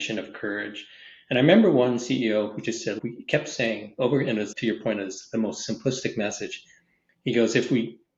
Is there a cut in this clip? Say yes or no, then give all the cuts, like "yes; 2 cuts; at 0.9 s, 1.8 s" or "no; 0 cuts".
no; 0 cuts